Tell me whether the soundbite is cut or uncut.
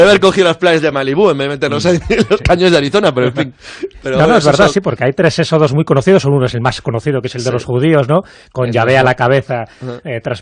uncut